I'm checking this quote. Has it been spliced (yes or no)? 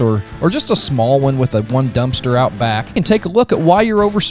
yes